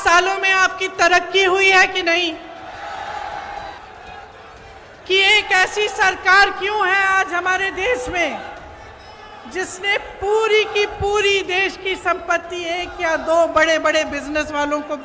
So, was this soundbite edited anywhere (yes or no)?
yes